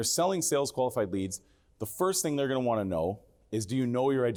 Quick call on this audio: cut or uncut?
uncut